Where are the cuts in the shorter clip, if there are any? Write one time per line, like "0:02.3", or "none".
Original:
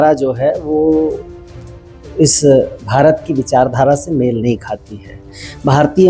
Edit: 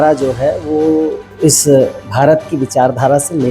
0:01.2